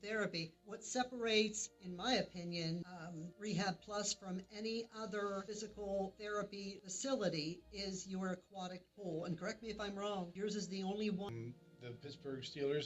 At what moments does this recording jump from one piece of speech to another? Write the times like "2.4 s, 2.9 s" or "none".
11.3 s